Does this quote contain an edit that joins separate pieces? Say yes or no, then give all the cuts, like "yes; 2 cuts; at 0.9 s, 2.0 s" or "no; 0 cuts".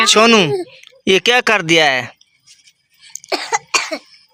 no; 0 cuts